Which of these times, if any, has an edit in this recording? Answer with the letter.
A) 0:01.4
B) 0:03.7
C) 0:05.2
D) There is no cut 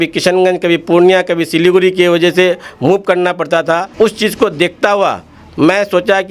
D